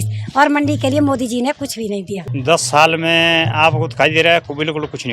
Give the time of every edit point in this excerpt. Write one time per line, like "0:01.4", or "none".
0:02.2